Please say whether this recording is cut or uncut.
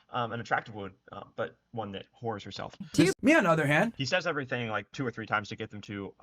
cut